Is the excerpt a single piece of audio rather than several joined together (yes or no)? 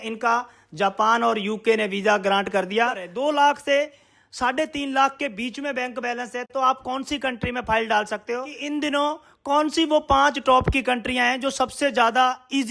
no